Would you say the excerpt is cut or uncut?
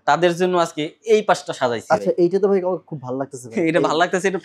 uncut